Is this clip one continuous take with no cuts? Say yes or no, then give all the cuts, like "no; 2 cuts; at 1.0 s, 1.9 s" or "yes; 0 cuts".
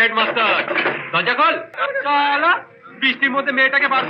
no; 1 cut; at 1.8 s